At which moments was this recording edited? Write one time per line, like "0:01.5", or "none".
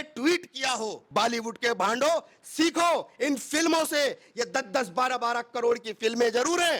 0:01.0